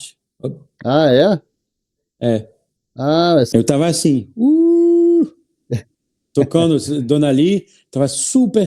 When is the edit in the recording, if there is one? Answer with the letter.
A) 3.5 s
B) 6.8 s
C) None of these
A